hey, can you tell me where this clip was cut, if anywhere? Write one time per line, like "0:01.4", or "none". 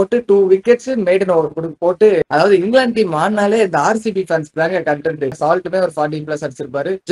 0:02.2
0:05.4